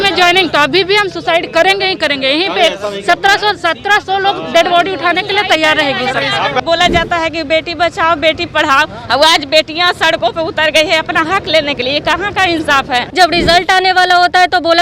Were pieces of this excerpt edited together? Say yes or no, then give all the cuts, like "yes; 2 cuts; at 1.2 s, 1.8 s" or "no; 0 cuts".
yes; 2 cuts; at 6.6 s, 13.1 s